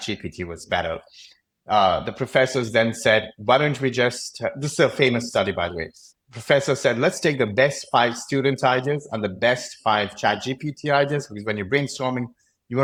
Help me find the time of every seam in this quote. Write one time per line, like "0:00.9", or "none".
none